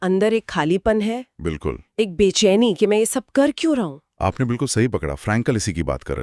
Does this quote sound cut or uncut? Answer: uncut